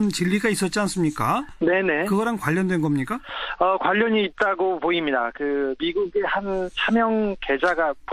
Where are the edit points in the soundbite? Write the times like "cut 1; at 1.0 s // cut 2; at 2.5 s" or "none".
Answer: cut 1; at 1.9 s